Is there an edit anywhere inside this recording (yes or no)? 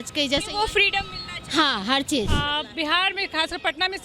yes